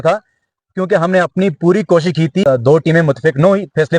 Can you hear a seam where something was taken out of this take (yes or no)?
yes